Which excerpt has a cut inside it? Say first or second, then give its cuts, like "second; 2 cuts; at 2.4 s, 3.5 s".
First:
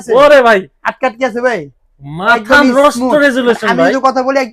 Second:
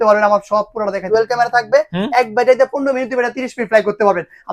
second; 1 cut; at 1.1 s